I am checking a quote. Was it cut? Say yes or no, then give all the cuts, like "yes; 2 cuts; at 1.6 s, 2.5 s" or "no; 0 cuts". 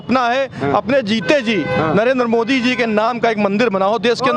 no; 0 cuts